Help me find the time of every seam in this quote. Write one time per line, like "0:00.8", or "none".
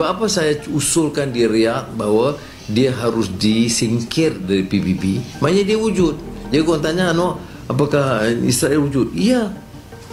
none